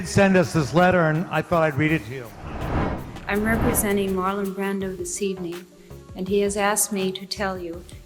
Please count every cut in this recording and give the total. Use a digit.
1